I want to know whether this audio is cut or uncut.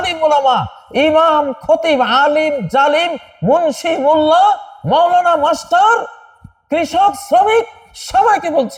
uncut